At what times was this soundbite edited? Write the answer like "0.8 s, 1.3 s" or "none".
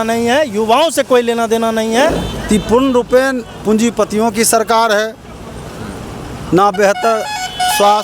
2.2 s